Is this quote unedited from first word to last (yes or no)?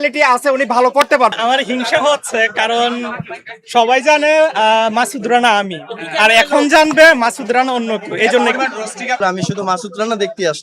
no